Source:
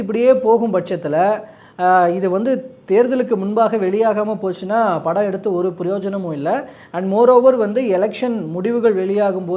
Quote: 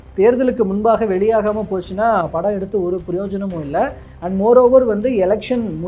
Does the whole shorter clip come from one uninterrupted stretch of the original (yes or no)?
yes